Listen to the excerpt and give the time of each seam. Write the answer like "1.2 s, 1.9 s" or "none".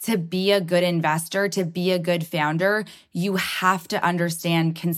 none